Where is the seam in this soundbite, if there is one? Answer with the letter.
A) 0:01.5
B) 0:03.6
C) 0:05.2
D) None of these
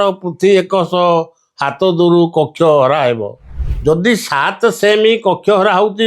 B